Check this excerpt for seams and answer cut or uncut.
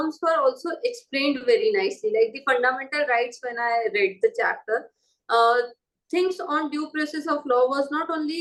uncut